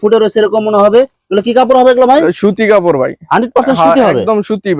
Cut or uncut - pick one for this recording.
uncut